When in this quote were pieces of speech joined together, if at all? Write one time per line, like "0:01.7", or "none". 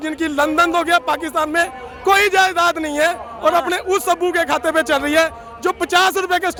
none